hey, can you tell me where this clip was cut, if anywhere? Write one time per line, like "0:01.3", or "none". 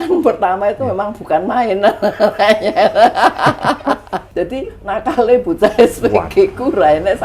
0:04.2